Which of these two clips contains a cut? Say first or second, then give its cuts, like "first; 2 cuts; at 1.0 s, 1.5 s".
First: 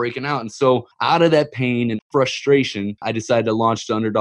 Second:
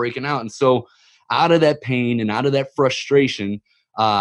first; 3 cuts; at 0.9 s, 2.0 s, 3.1 s